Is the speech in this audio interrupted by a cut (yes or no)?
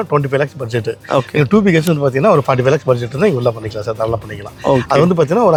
no